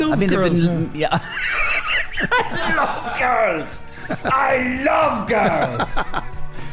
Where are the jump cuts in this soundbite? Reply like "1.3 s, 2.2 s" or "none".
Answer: none

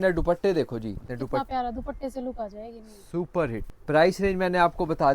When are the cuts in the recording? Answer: 1.1 s, 3.7 s

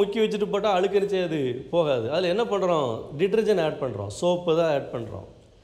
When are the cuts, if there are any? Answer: none

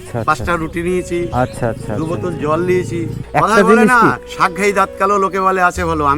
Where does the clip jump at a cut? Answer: 3.2 s

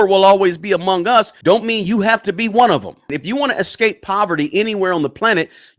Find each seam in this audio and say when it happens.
1.3 s, 3.2 s

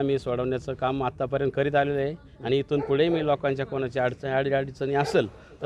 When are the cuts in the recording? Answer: none

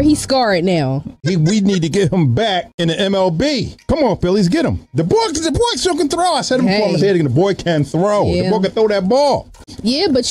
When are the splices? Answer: 2.7 s, 3.7 s

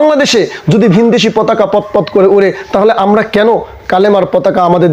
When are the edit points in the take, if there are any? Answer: none

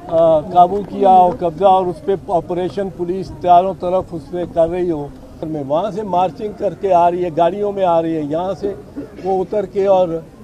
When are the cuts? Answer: 5.4 s

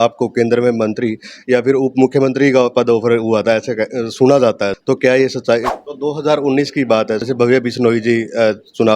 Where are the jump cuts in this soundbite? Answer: 4.8 s, 5.7 s, 7.2 s

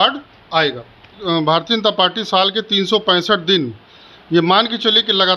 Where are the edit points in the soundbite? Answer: 1.2 s

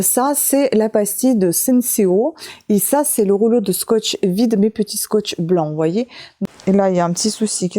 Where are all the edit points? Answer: 6.2 s

